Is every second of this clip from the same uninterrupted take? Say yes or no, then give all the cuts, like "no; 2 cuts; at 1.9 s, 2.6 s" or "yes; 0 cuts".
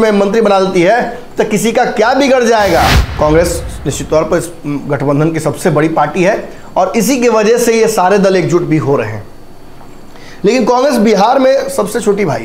no; 1 cut; at 3.0 s